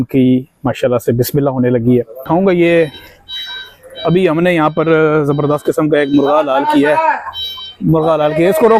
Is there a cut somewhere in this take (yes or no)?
yes